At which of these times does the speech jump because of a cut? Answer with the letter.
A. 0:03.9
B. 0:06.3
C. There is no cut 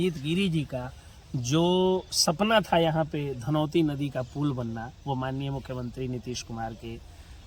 C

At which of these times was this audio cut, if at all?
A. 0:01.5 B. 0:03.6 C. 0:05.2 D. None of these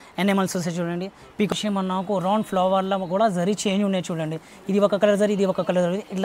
A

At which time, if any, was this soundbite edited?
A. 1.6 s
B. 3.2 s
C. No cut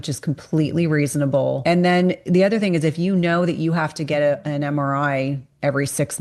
A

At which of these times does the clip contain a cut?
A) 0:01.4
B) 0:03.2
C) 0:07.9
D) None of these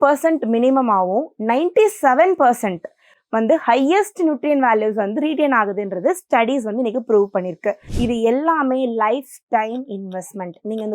C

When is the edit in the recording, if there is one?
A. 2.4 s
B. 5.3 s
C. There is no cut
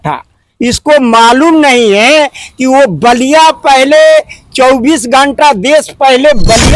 C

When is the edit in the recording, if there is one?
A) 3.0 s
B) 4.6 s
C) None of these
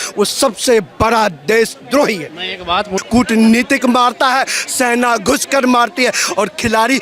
A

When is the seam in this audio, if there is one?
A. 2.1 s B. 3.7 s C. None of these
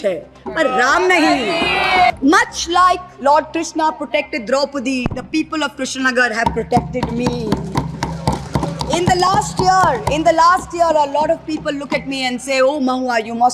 A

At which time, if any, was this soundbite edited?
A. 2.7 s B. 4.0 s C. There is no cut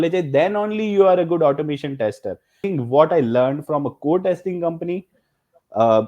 A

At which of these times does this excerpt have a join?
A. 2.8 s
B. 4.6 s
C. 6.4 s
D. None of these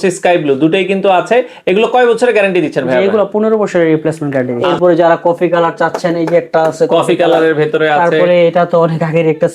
B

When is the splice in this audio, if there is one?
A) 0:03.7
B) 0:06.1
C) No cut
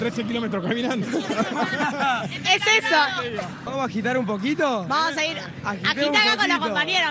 A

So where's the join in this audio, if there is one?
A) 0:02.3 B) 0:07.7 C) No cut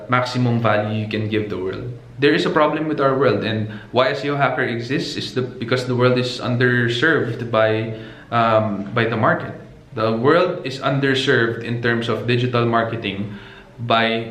C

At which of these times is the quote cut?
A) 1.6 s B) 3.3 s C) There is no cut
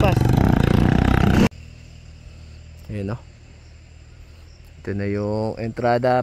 A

